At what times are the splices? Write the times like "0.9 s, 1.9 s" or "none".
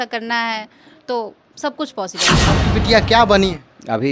2.4 s